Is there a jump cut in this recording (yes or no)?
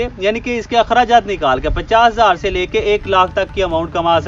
no